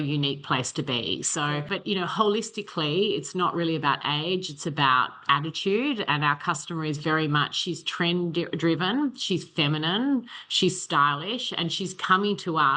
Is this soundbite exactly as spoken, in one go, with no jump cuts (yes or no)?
yes